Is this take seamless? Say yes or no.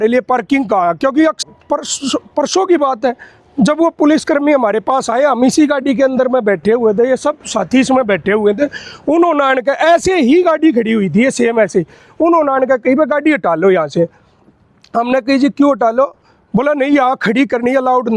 no